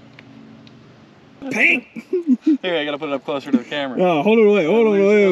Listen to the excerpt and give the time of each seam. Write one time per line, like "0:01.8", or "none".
0:01.4